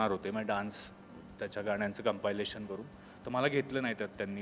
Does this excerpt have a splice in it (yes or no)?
no